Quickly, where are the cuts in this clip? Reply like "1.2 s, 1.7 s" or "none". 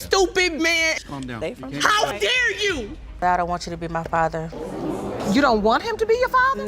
3.1 s

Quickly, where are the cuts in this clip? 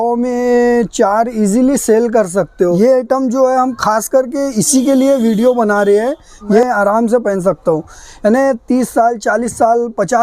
2.8 s, 6.6 s

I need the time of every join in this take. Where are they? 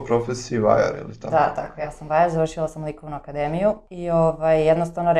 3.9 s

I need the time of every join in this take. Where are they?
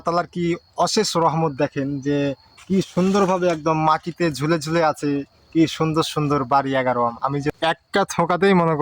7.5 s

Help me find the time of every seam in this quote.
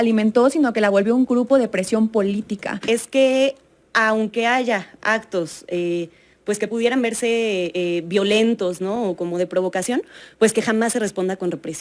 2.7 s

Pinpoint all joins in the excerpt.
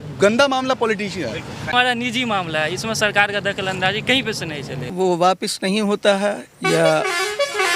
1.6 s, 4.8 s

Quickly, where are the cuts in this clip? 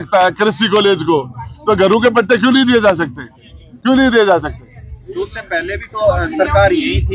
none

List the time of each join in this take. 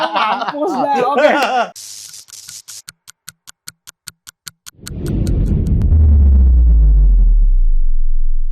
1.7 s

